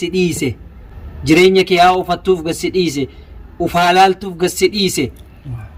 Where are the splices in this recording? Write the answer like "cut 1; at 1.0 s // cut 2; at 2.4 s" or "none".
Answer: none